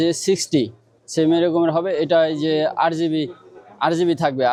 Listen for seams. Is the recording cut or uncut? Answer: uncut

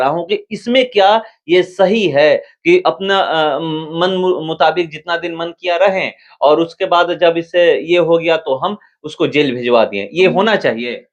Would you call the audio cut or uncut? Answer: uncut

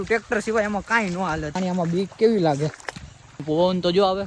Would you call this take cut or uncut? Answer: cut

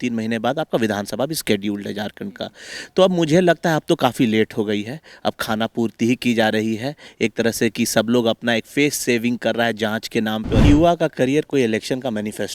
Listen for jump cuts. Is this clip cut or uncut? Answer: cut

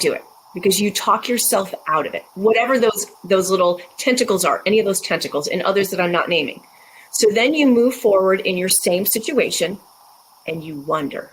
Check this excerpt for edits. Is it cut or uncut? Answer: uncut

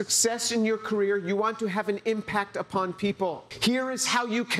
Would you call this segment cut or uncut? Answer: cut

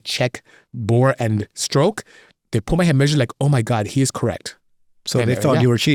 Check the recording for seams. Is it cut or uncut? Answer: uncut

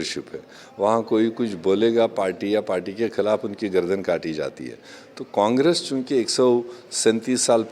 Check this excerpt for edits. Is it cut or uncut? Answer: uncut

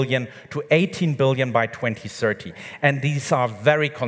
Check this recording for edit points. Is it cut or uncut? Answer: uncut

